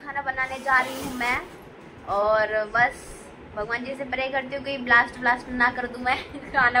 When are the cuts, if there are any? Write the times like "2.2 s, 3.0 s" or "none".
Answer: none